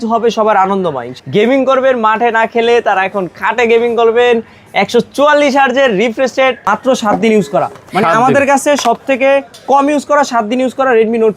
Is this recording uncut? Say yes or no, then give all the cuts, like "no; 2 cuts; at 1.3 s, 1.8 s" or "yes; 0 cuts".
no; 2 cuts; at 1.1 s, 6.6 s